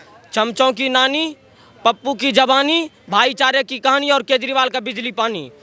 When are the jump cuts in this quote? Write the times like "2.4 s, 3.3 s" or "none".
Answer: none